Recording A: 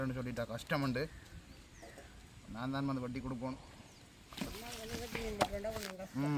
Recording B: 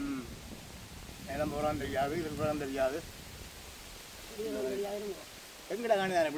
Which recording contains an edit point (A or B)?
B